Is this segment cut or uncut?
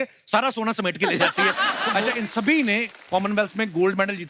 cut